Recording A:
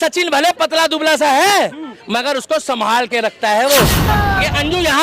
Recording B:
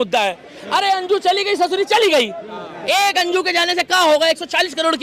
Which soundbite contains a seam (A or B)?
A